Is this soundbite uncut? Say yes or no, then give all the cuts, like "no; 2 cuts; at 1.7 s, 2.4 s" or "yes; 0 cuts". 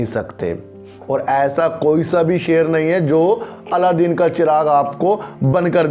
yes; 0 cuts